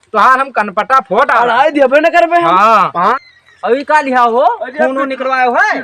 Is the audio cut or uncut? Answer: cut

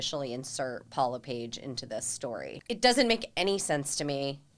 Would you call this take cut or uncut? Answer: cut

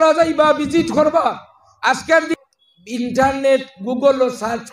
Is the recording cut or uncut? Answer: cut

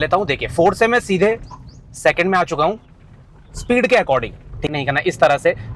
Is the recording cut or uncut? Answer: cut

